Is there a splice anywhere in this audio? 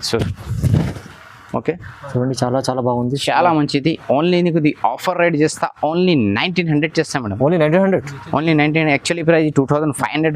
no; 0 cuts

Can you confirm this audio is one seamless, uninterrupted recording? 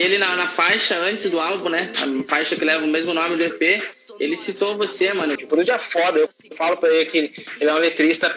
no; 1 cut; at 5.4 s

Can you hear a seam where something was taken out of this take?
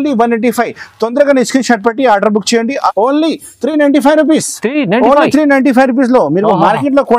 yes; 1 cut; at 2.9 s

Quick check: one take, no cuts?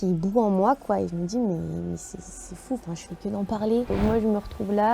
no; 1 cut; at 3.9 s

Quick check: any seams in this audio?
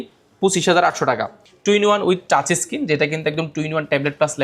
yes; 1 cut; at 1.3 s

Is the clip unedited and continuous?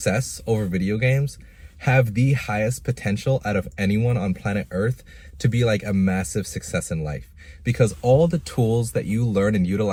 yes; 0 cuts

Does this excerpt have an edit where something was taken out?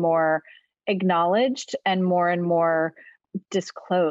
yes; 1 cut; at 3.2 s

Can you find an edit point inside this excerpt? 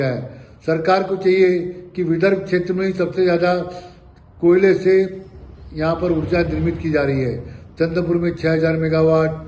no; 0 cuts

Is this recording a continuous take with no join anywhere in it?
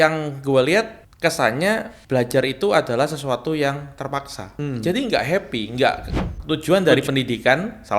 no; 4 cuts; at 1.0 s, 1.9 s, 4.5 s, 6.3 s

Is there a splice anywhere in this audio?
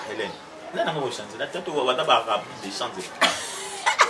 no; 0 cuts

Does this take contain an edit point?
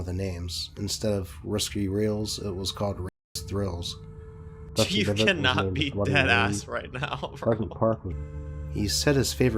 yes; 1 cut; at 8.1 s

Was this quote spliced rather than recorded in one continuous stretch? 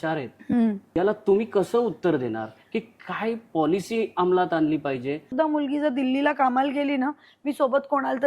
yes; 2 cuts; at 1.0 s, 5.2 s

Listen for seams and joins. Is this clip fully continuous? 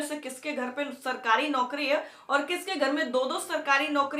yes; 0 cuts

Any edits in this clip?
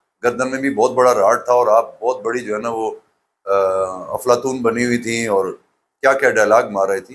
no; 0 cuts

